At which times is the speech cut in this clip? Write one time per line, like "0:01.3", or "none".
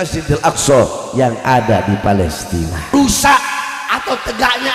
0:02.9

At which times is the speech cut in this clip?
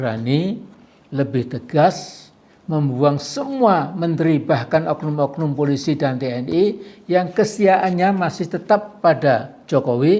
none

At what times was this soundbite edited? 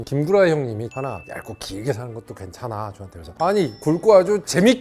0:00.9

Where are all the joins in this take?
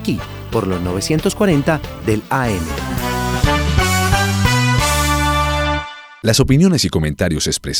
none

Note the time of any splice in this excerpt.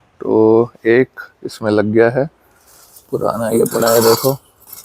none

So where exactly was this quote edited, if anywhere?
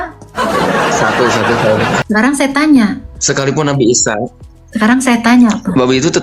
0:02.0

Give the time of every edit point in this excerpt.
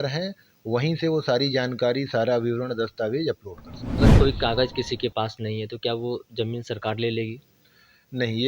0:04.0

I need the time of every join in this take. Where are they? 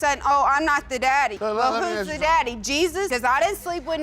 0:01.4

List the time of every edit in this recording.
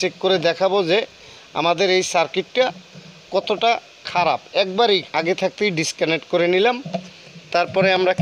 0:05.1

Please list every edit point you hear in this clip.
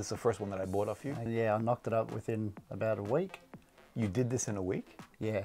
0:01.3

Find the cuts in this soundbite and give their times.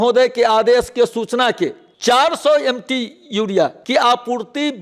0:01.8
0:03.8

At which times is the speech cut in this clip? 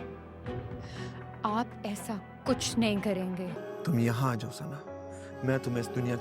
0:03.5

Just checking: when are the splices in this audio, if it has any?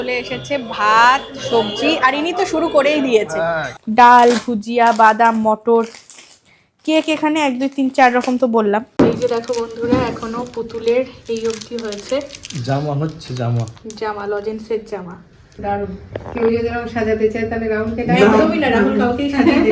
0:03.7
0:08.9
0:15.6

